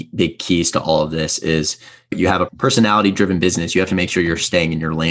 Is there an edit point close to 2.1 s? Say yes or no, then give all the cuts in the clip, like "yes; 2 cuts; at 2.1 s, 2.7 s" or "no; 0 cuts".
yes; 1 cut; at 2.1 s